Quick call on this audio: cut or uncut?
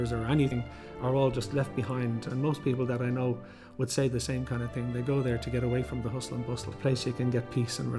uncut